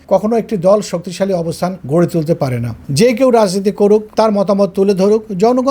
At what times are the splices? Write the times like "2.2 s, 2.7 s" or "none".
1.8 s, 2.8 s